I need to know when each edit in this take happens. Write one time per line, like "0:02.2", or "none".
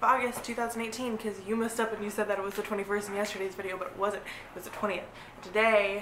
none